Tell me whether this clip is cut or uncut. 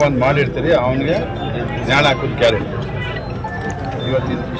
uncut